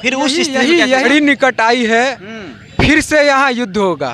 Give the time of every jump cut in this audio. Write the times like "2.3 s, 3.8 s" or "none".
1.1 s